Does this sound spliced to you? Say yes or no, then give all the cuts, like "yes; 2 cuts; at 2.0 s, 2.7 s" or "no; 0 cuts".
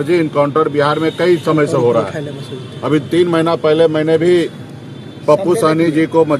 no; 0 cuts